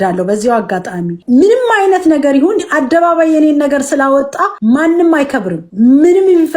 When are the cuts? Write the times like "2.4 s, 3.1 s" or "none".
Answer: 1.2 s, 4.5 s, 5.6 s

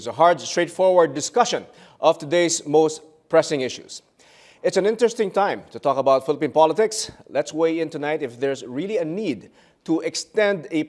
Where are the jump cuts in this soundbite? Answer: 7.1 s

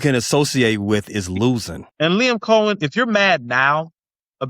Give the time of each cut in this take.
1.8 s

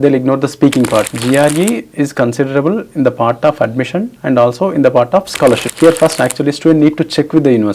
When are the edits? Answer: 1.1 s, 5.7 s

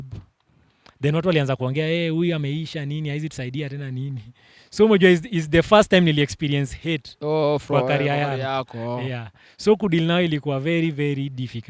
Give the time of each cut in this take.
none

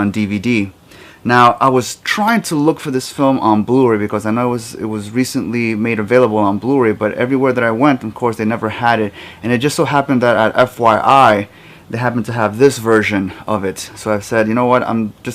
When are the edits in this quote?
2.5 s

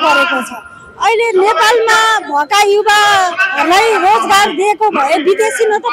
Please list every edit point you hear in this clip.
none

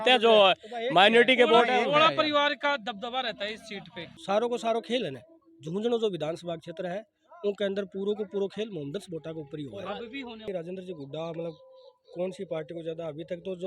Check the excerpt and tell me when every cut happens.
4.1 s, 10.4 s

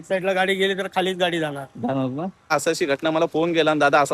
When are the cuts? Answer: 2.5 s

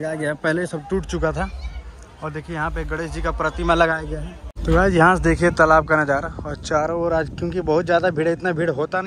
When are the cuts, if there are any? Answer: 4.6 s

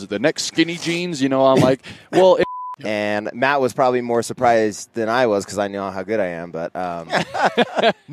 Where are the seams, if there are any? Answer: 2.4 s

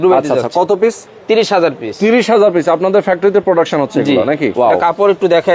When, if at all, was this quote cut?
4.5 s

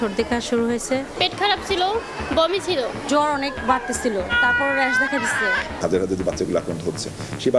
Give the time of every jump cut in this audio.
1.1 s, 3.0 s, 4.3 s, 5.8 s

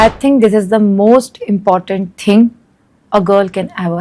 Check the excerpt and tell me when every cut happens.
none

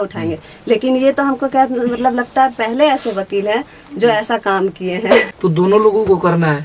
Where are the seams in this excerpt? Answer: 5.3 s

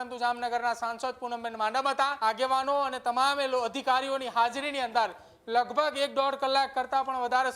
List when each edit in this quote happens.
2.1 s

